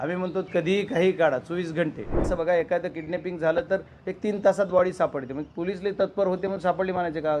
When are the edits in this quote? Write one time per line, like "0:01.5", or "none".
0:02.2

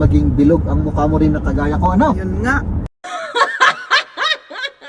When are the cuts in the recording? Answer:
none

